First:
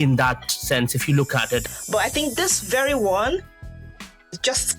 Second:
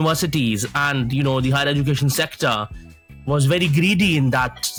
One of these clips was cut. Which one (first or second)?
first